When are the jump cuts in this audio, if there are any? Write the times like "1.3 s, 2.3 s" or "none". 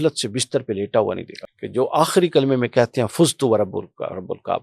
1.3 s